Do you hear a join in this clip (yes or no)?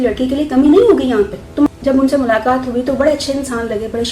yes